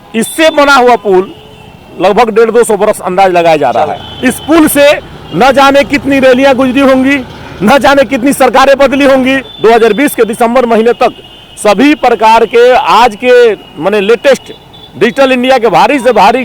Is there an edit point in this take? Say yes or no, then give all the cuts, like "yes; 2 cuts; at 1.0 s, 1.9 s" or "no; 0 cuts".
yes; 2 cuts; at 4.1 s, 9.5 s